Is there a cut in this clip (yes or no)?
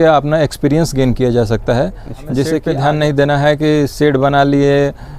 yes